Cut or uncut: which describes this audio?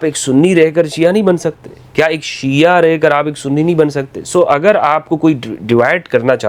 uncut